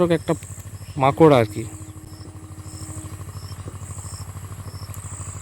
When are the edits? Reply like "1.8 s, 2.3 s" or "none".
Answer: none